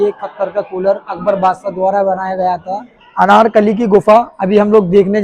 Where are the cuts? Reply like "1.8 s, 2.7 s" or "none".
2.9 s